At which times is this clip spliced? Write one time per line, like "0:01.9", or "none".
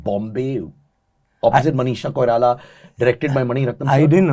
none